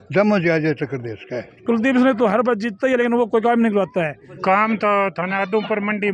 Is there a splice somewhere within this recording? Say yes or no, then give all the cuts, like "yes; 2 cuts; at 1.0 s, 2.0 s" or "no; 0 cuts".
yes; 2 cuts; at 1.5 s, 4.3 s